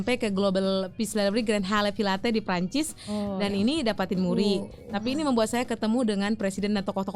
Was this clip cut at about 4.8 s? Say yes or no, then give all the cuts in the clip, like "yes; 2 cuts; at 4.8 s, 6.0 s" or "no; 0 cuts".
no; 0 cuts